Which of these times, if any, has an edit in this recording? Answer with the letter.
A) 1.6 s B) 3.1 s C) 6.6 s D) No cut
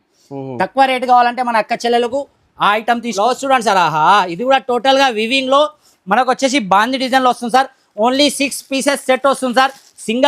B